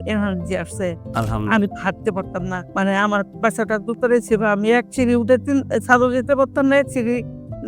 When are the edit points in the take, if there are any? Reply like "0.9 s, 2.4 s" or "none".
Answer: 2.6 s